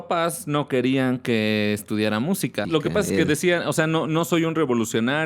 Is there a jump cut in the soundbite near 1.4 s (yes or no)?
no